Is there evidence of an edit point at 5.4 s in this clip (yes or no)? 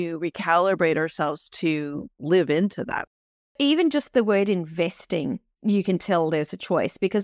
no